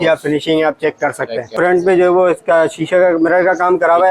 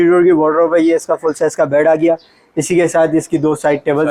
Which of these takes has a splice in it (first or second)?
first